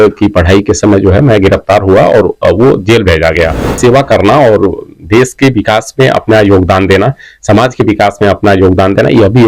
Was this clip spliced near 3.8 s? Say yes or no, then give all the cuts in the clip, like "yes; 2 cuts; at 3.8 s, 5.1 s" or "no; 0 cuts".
yes; 1 cut; at 3.8 s